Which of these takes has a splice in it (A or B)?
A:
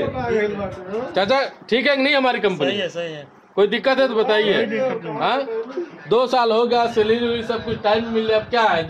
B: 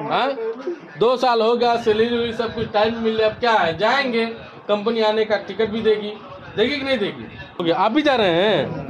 B